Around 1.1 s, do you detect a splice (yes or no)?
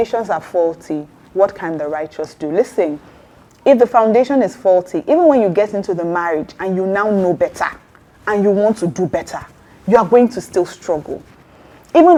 no